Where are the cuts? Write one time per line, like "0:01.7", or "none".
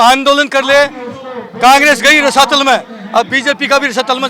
none